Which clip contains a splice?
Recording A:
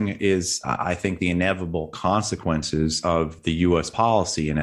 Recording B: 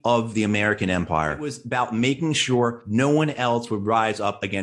B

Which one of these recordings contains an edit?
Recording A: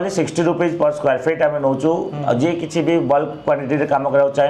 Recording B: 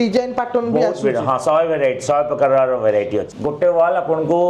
B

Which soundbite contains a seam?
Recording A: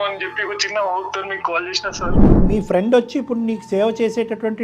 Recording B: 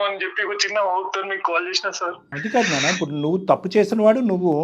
A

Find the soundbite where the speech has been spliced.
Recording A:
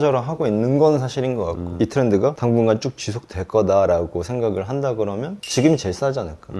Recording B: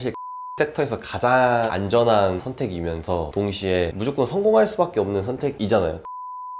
A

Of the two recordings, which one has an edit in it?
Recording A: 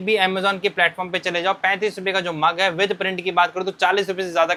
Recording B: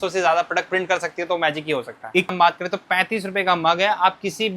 B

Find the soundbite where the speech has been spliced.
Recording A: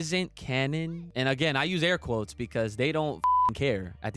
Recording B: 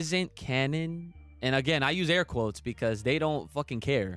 A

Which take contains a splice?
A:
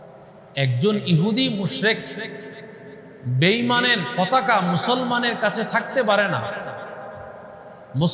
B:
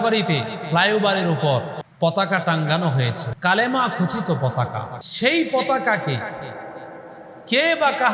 B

